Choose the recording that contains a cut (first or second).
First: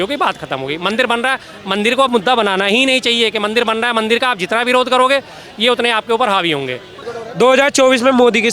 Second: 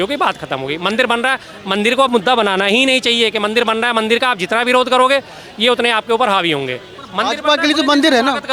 first